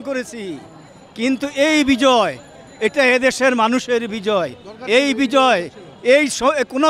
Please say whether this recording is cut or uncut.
uncut